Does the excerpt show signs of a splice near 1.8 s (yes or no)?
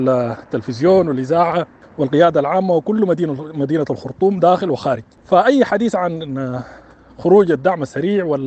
yes